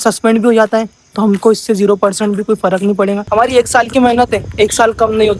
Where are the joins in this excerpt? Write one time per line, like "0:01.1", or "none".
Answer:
0:03.2